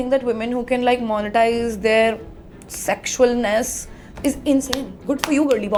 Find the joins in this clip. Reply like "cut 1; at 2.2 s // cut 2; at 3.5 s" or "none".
none